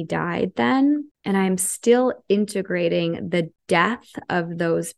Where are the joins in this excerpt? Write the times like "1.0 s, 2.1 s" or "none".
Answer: 1.1 s, 3.6 s